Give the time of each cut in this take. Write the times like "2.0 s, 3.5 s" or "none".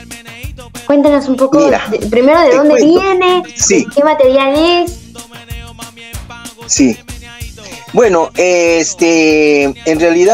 none